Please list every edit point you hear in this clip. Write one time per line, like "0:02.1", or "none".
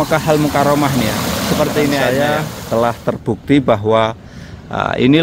0:02.0